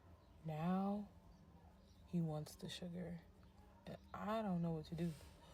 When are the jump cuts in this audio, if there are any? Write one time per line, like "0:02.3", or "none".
none